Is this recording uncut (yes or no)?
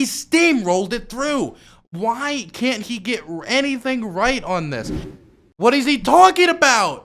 no